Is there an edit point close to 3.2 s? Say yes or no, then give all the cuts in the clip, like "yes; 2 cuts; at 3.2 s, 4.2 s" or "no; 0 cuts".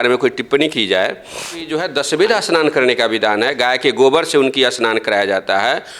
no; 1 cut; at 1.7 s